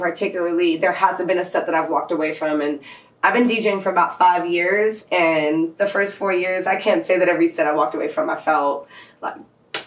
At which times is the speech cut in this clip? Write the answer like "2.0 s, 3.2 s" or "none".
none